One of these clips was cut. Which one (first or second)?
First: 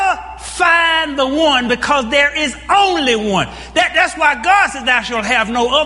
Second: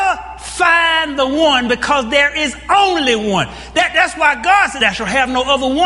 second